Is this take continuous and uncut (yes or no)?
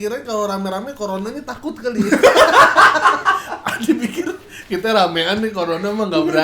yes